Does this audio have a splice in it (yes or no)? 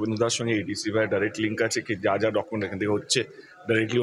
no